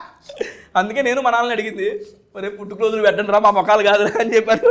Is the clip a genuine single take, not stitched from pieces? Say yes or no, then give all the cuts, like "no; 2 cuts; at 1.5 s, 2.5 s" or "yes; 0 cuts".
yes; 0 cuts